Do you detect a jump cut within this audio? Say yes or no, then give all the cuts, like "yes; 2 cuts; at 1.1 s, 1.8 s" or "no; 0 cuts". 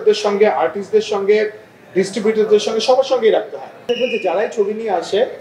yes; 1 cut; at 3.8 s